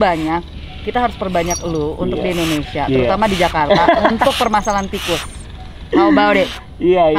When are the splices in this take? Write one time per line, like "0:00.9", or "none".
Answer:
none